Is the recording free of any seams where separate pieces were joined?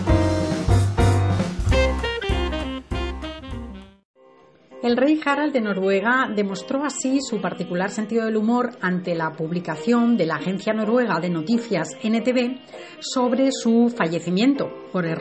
no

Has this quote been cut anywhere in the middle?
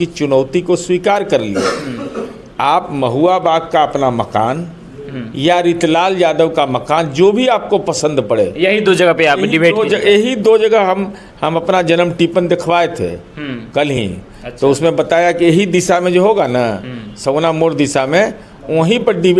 no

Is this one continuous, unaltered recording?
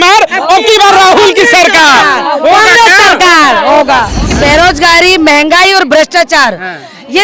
no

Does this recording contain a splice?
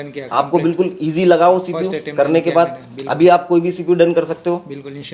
no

